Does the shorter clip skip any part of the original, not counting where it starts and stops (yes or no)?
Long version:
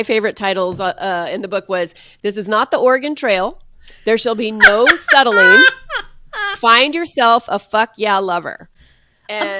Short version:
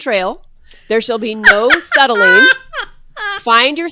no